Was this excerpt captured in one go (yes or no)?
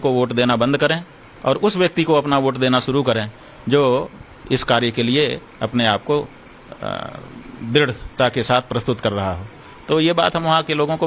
no